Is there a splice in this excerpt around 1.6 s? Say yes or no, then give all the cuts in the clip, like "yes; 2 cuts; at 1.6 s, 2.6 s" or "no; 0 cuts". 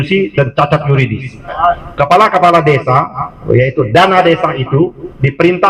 yes; 1 cut; at 1.6 s